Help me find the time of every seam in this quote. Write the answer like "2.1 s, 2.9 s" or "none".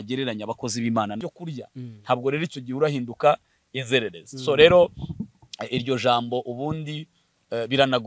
1.2 s